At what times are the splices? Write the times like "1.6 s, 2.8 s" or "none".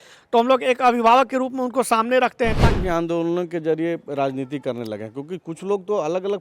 2.7 s